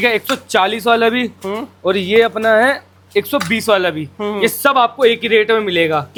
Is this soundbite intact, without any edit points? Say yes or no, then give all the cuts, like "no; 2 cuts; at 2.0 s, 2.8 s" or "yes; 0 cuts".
yes; 0 cuts